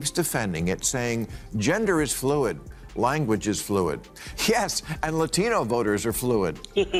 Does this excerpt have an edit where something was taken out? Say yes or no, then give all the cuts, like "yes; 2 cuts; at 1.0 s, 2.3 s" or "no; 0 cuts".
no; 0 cuts